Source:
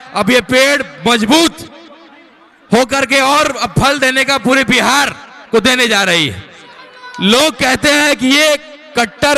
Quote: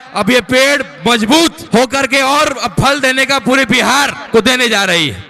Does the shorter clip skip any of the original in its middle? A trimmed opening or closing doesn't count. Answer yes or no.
yes